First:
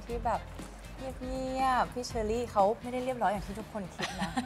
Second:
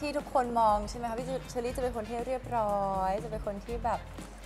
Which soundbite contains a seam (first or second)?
first